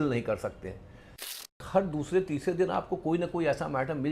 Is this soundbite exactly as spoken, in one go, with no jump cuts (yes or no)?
no